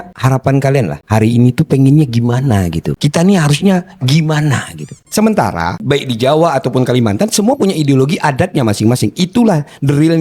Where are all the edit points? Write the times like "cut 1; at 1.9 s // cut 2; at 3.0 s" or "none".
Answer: cut 1; at 5.0 s